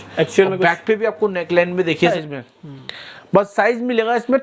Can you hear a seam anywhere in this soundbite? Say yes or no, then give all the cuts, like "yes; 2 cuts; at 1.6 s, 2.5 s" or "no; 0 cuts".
yes; 1 cut; at 2.1 s